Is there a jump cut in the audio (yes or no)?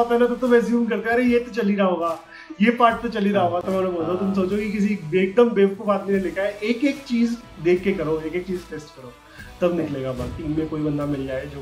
yes